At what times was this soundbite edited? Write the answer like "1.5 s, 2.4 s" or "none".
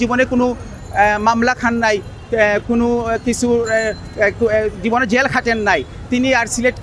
none